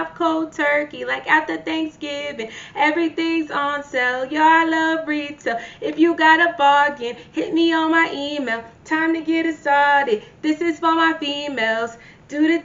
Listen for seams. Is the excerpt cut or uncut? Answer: uncut